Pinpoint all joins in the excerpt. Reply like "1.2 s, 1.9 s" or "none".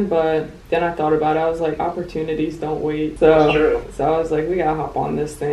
3.1 s, 3.9 s